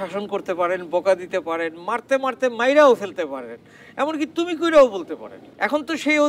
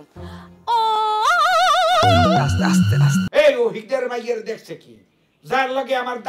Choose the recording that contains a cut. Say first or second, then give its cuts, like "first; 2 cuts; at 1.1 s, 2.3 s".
second; 1 cut; at 3.3 s